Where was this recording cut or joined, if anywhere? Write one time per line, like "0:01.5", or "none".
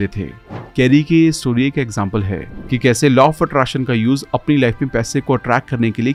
none